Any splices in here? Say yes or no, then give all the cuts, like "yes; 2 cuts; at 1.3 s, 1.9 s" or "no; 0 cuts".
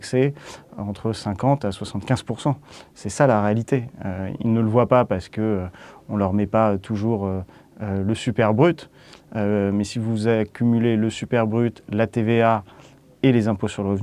no; 0 cuts